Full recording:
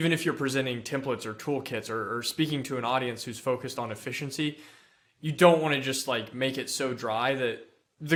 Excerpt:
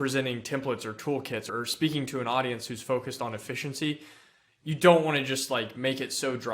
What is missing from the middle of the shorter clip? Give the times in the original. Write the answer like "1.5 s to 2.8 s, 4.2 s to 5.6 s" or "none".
1.9 s to 2.0 s